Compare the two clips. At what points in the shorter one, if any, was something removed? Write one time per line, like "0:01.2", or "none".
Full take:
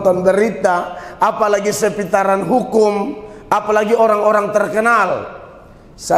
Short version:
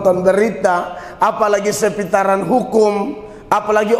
none

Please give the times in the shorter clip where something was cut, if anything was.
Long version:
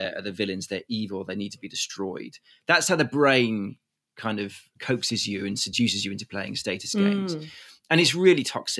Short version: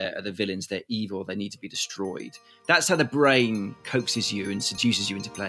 0:03.8

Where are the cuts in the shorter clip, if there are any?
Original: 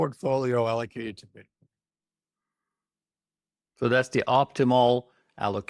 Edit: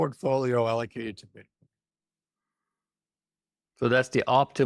none

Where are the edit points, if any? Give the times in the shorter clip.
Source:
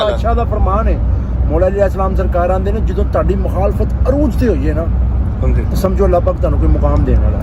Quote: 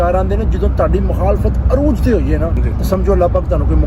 0:02.6

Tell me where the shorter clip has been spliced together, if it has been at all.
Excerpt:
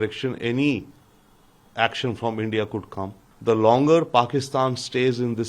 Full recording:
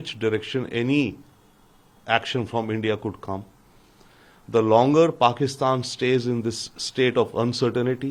0:03.2

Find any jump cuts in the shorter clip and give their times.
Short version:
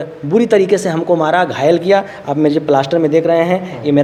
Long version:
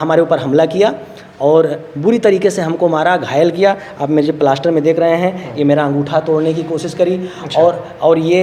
none

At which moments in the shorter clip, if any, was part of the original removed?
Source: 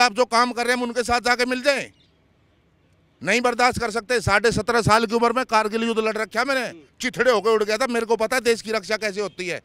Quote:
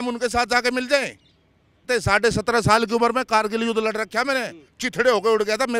0:01.8

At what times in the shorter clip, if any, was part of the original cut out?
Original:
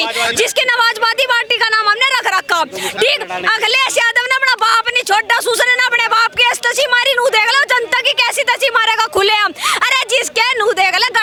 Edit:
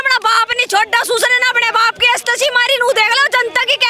none

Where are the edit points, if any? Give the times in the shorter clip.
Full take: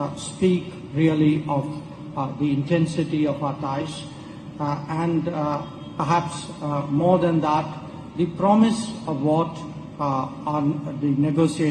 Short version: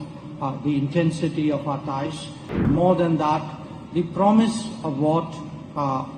0:02.6

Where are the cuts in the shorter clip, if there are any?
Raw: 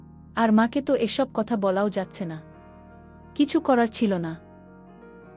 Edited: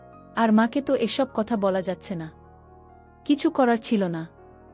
0:01.8

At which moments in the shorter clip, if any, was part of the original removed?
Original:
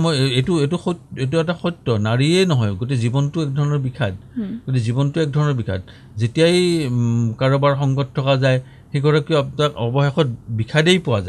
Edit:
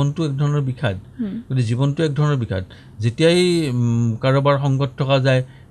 none

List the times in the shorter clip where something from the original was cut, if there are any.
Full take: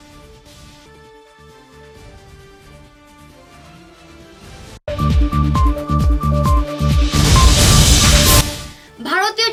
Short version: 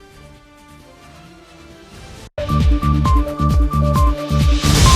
none

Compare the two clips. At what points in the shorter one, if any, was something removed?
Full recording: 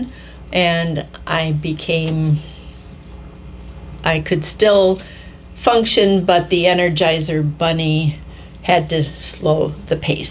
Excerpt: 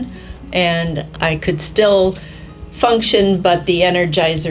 0:01.1

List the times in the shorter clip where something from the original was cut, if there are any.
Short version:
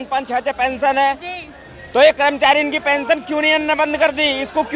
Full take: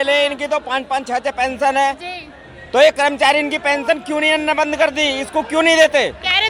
none

